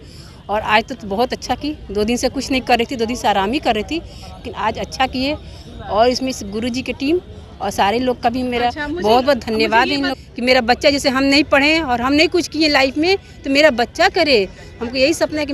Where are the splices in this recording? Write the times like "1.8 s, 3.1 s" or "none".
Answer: 10.1 s